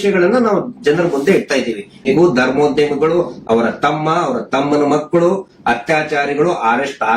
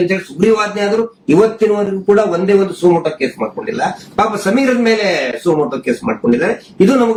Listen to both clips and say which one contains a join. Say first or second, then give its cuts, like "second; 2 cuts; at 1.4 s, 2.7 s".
first; 1 cut; at 2.1 s